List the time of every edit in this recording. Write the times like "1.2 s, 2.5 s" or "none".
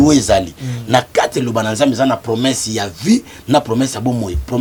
none

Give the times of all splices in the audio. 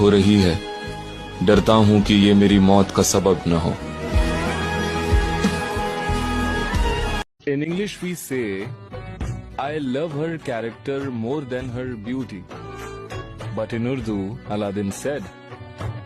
7.3 s

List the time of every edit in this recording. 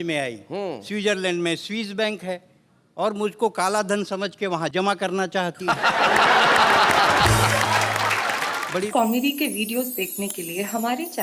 8.9 s

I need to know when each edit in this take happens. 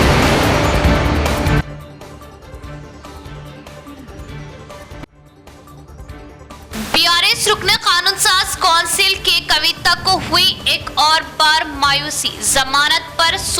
1.4 s

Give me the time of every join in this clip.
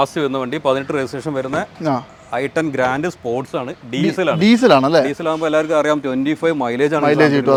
none

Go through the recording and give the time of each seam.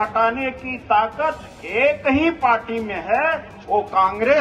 none

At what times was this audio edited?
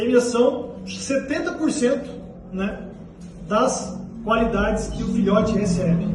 none

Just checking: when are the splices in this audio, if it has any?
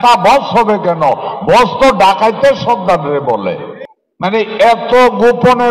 3.7 s

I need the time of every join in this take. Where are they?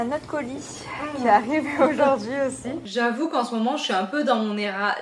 2.8 s

